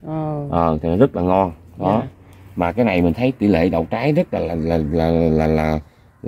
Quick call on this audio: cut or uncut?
uncut